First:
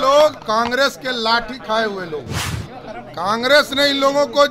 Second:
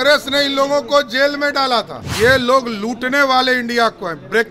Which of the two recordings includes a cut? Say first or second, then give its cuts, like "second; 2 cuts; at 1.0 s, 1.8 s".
second; 1 cut; at 2.0 s